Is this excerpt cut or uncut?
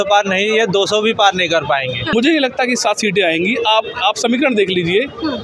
cut